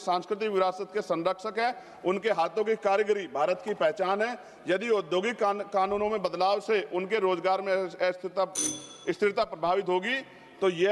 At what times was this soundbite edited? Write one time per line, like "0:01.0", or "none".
none